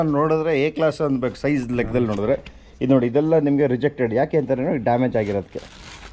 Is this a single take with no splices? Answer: yes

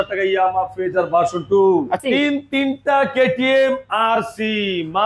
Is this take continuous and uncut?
no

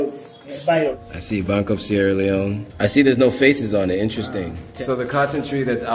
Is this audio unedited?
no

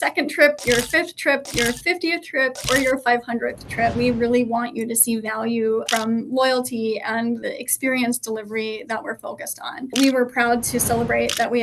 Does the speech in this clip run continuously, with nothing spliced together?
no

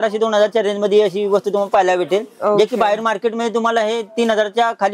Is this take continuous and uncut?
yes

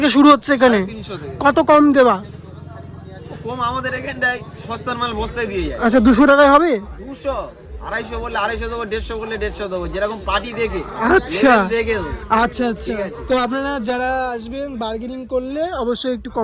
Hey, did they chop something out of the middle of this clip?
no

